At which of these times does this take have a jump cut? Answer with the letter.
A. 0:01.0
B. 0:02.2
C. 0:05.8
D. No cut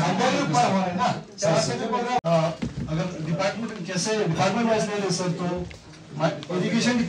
B